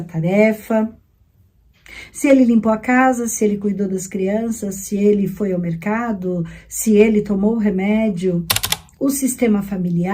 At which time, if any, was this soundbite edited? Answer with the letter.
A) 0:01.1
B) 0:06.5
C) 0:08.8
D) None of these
C